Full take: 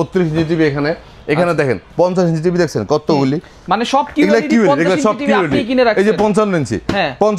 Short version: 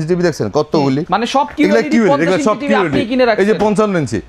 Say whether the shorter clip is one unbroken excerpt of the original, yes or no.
no